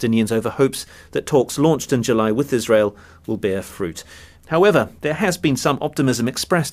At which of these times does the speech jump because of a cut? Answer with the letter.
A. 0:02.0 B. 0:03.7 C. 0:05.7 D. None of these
D